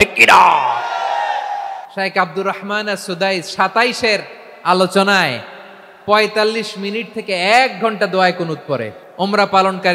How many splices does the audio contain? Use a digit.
2